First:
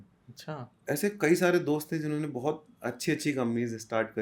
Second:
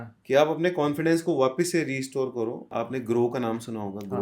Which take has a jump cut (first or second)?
second